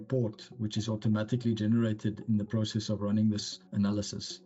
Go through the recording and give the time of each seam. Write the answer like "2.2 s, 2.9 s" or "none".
3.6 s